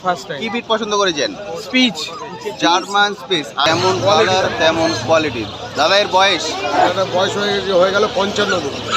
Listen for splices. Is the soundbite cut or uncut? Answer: cut